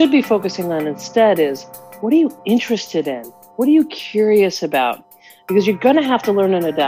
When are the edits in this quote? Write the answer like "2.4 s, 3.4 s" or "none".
none